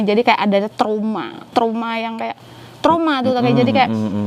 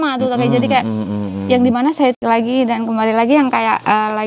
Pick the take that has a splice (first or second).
second